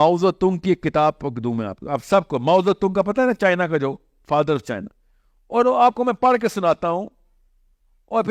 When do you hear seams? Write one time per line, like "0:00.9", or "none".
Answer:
none